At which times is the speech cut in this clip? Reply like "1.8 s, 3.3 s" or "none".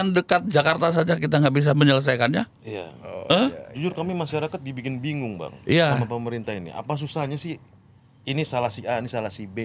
none